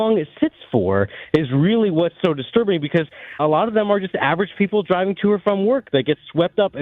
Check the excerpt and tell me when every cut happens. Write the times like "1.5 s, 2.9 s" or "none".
3.2 s